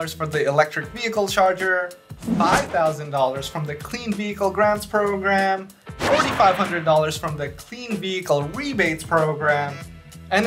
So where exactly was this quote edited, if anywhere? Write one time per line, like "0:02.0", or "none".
none